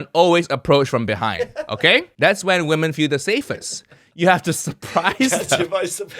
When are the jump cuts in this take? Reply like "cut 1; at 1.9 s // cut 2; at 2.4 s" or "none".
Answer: cut 1; at 2.1 s